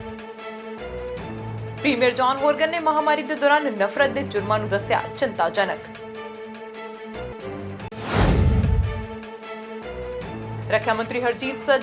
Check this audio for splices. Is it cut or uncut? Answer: cut